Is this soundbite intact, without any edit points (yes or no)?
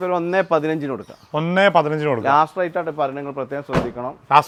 yes